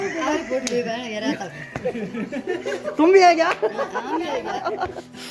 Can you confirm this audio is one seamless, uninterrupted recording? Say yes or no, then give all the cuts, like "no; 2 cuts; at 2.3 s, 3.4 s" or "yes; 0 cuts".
yes; 0 cuts